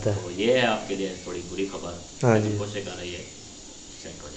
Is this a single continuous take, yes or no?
yes